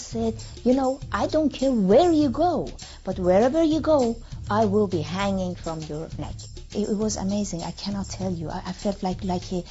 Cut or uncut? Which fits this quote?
cut